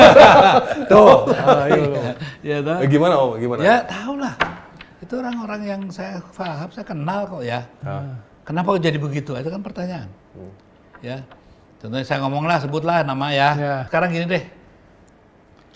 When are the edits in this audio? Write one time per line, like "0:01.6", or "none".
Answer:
0:13.8